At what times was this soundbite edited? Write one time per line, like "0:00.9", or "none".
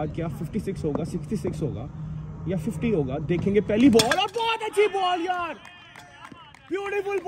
none